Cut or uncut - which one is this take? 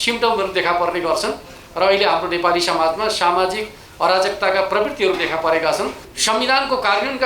cut